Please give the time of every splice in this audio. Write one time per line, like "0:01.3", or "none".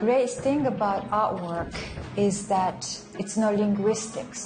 0:03.1